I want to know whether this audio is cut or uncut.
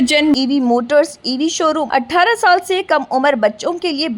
cut